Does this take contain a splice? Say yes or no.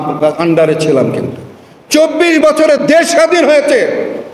no